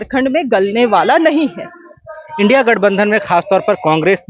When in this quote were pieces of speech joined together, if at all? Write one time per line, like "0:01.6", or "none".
none